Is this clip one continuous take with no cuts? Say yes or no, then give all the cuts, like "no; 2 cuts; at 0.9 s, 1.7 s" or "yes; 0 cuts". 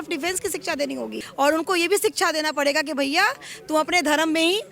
no; 1 cut; at 1.2 s